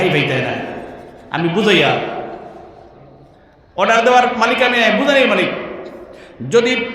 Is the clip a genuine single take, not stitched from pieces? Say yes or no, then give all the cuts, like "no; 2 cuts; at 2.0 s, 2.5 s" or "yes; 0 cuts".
yes; 0 cuts